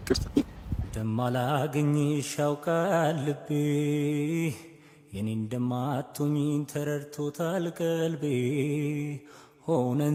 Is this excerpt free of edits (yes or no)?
yes